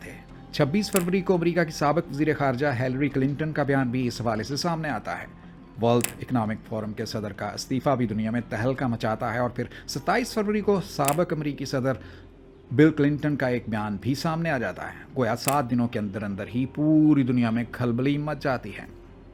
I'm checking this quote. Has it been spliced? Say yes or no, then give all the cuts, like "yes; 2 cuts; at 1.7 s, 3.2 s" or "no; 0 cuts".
no; 0 cuts